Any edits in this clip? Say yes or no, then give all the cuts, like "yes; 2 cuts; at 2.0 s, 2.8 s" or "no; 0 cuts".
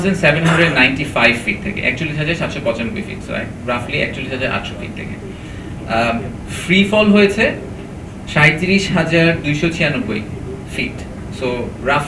no; 0 cuts